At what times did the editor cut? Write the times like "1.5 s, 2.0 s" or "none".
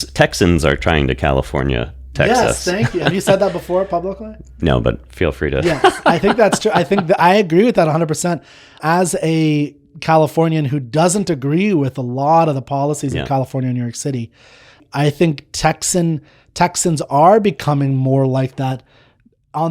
8.8 s, 14.8 s